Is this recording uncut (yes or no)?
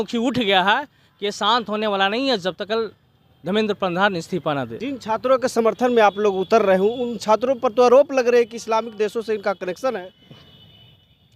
no